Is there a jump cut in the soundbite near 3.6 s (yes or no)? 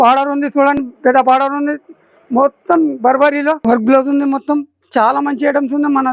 yes